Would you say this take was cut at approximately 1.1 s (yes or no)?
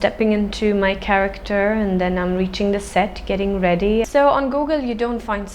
no